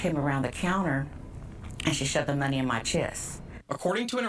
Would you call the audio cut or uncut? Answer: cut